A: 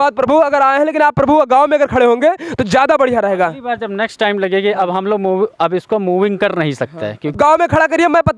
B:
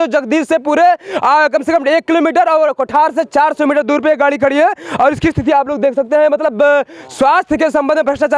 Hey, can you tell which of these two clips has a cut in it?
A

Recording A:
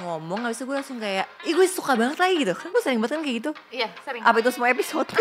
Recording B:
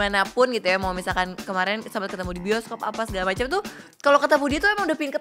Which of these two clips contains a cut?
A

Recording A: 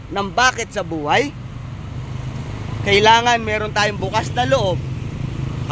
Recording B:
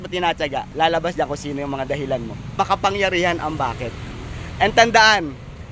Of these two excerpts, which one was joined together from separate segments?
B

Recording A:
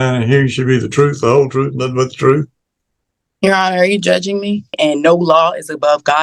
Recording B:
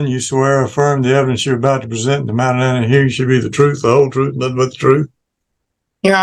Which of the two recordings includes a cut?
A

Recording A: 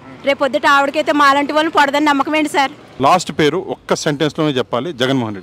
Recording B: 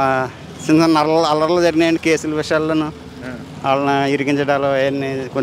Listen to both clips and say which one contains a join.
A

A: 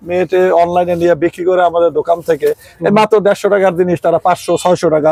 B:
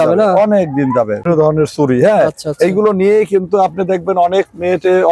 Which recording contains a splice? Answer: B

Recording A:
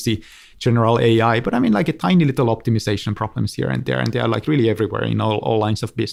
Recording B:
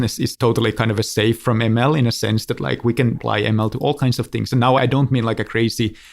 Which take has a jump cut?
B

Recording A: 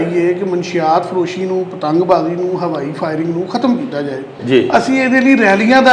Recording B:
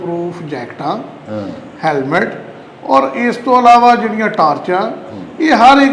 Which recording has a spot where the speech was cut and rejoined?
A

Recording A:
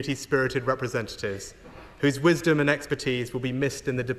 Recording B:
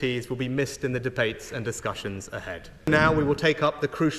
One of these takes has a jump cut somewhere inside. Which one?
B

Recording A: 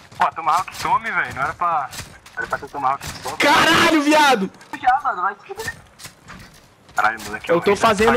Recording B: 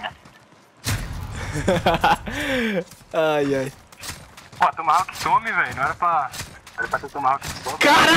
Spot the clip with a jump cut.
A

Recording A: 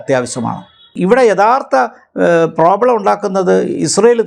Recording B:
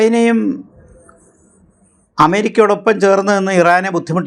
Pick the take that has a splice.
A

